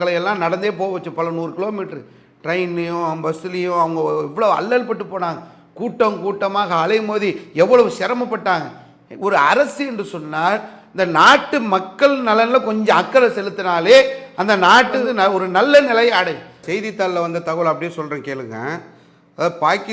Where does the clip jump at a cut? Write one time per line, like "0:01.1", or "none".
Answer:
0:16.5